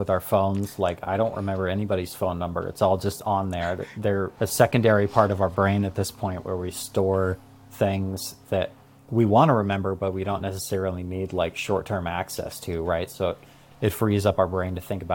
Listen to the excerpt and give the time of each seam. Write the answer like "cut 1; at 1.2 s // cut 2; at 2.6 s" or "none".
none